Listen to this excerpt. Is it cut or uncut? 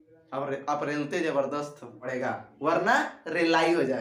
cut